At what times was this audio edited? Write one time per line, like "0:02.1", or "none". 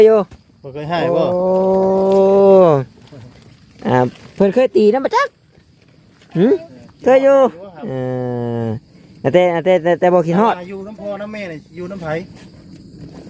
none